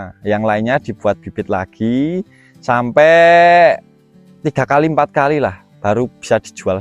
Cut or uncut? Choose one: uncut